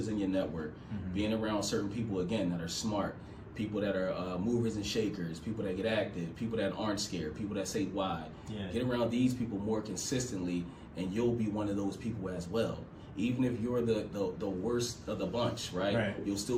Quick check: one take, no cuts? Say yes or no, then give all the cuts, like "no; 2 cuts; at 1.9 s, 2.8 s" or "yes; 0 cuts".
yes; 0 cuts